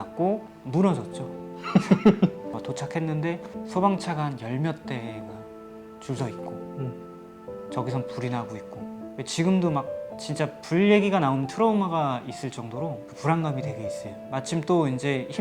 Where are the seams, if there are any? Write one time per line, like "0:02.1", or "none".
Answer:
0:02.5